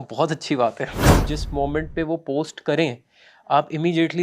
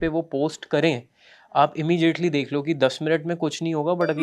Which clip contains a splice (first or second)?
first